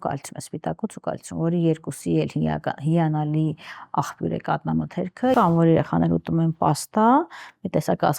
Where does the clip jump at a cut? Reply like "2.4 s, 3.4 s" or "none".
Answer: 5.3 s